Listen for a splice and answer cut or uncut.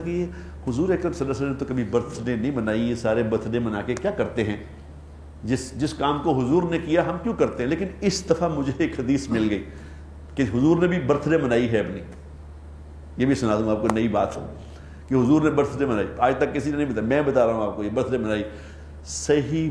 uncut